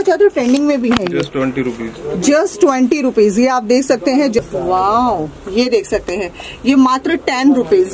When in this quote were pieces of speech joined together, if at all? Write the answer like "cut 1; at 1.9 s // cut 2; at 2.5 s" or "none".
cut 1; at 4.4 s